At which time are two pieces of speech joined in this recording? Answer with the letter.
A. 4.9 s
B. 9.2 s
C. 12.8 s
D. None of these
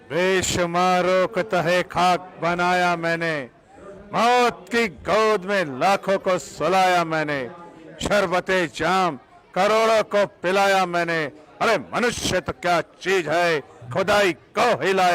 D